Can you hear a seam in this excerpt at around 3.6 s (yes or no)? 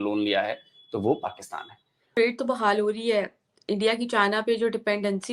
no